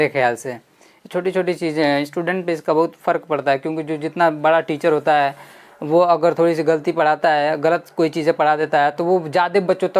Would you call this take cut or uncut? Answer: uncut